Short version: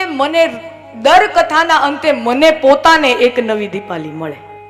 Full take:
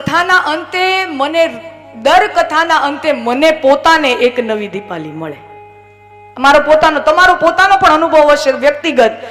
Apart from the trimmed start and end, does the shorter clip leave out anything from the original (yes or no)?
no